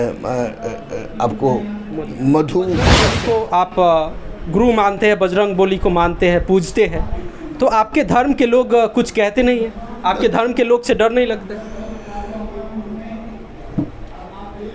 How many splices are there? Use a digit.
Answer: 1